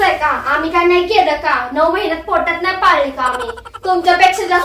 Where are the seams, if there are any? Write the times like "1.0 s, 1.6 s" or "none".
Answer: none